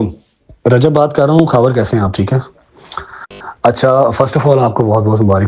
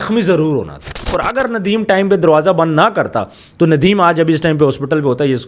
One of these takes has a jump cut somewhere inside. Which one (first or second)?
second